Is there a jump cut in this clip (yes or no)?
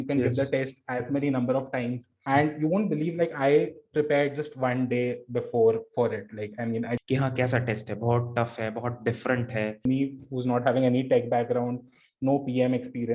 yes